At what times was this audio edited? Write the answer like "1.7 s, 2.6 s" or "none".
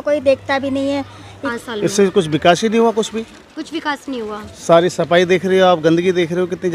1.5 s

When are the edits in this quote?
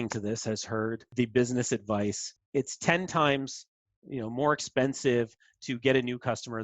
1.1 s, 2.3 s

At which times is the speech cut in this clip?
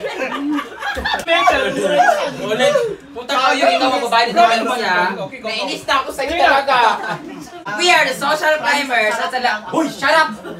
1.3 s, 7.6 s

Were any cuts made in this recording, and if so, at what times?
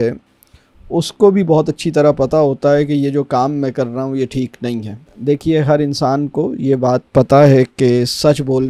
none

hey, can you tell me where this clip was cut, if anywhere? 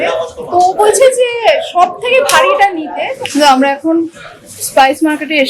3.1 s

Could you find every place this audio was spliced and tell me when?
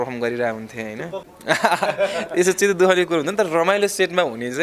1.3 s

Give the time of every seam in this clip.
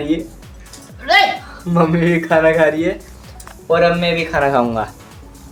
none

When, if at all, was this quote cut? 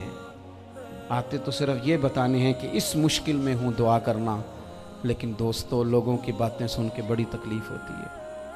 7.6 s

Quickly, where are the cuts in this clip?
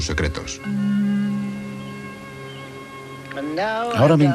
3.1 s

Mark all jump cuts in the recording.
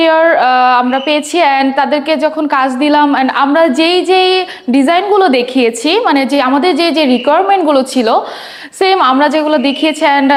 none

